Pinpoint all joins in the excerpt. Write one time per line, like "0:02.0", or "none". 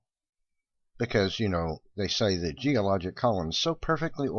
0:02.2